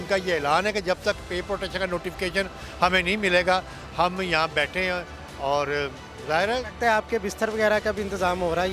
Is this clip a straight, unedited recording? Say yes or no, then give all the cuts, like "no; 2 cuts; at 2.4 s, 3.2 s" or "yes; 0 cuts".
yes; 0 cuts